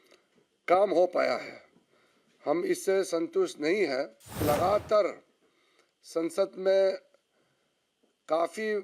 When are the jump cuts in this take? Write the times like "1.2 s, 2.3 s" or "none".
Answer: 4.4 s